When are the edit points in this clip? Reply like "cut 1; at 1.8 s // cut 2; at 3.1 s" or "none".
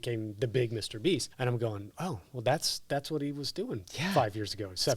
cut 1; at 1.3 s